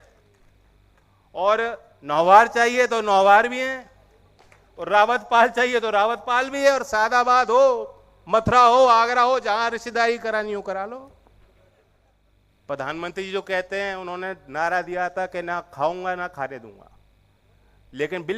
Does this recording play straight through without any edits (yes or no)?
no